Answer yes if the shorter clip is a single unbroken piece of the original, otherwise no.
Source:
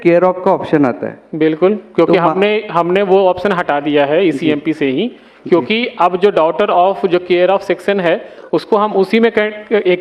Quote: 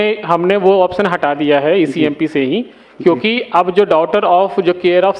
yes